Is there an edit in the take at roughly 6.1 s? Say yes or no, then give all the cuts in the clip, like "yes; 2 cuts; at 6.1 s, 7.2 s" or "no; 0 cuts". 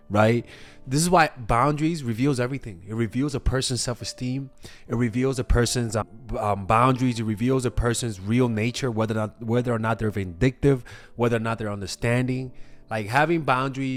no; 0 cuts